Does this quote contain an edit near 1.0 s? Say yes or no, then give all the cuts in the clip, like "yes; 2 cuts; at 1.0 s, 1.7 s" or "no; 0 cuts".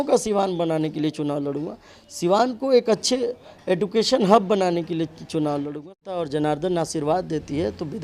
no; 1 cut; at 6.2 s